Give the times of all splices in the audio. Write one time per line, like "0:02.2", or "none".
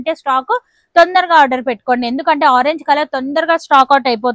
none